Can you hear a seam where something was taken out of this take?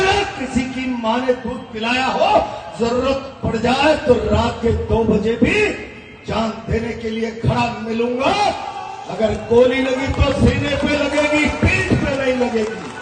no; 0 cuts

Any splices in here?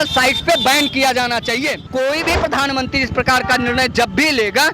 yes; 1 cut; at 1.9 s

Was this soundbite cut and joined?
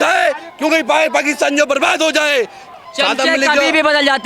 yes; 1 cut; at 2.6 s

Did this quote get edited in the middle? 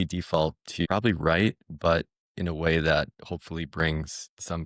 yes; 2 cuts; at 0.8 s, 2.2 s

